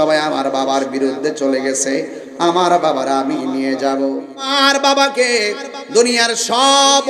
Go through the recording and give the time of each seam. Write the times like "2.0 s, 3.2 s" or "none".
4.5 s